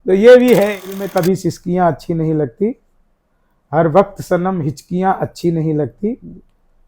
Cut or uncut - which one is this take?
cut